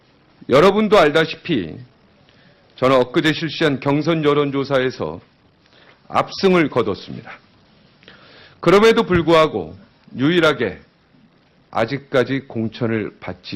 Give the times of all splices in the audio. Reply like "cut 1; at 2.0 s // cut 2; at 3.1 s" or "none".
none